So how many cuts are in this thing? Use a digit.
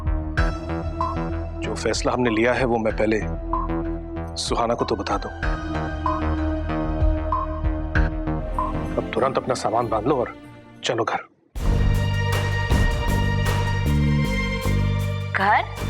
1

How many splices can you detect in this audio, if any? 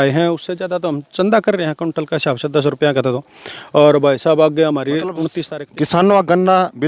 1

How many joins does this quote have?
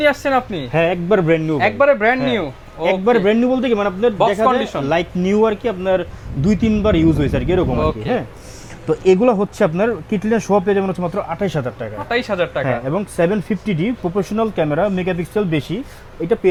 0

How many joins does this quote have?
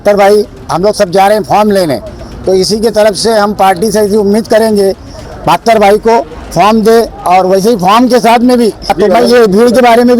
2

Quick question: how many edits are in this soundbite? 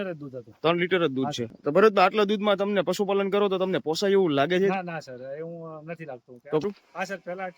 2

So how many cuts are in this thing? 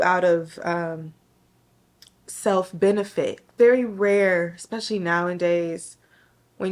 1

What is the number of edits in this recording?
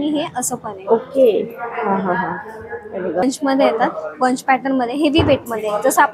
1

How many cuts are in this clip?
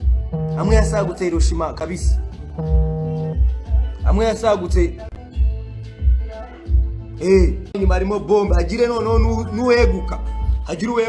1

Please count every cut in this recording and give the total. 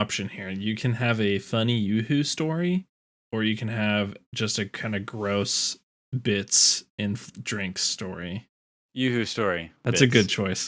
1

